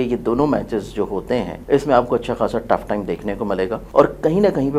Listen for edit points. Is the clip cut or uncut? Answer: cut